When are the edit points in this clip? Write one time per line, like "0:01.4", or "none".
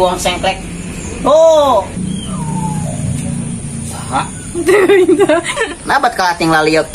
0:01.9
0:05.6

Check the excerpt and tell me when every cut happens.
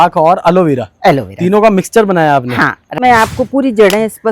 0:02.9

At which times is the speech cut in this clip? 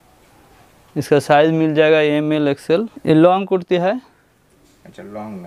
0:02.9

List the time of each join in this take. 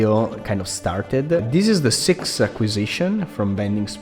0:01.5

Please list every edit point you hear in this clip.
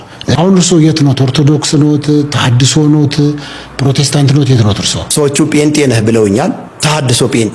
none

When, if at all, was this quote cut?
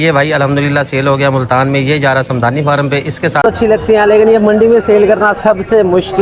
0:03.4

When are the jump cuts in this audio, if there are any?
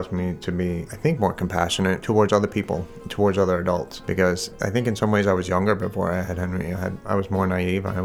0:00.9
0:02.0
0:03.9
0:04.5
0:07.0

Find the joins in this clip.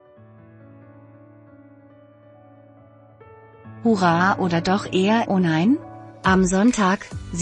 0:03.8

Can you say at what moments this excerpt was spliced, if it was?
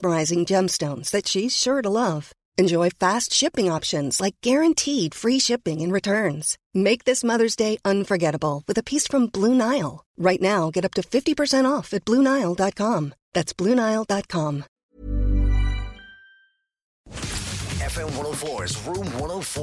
0:14.7
0:17.1

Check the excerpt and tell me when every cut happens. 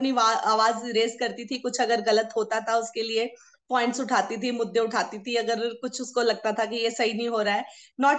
none

